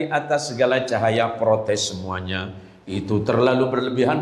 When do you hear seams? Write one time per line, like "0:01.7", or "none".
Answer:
none